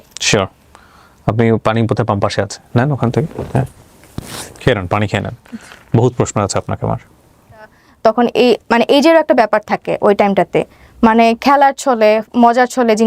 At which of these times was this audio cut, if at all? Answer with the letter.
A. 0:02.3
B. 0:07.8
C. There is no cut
B